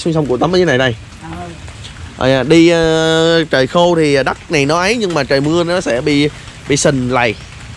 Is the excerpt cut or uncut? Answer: uncut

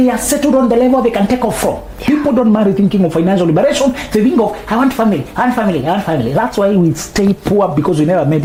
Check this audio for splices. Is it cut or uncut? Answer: uncut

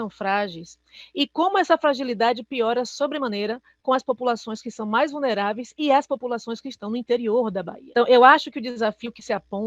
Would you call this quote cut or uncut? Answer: cut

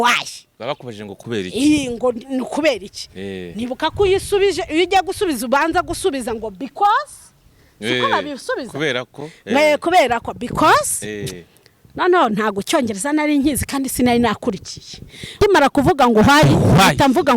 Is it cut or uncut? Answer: cut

